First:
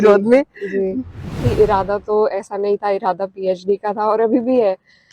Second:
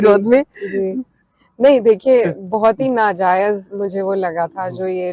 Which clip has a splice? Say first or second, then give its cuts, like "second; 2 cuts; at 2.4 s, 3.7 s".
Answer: first; 1 cut; at 1.4 s